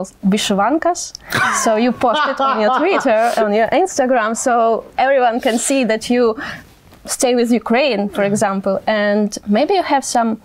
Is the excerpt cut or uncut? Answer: uncut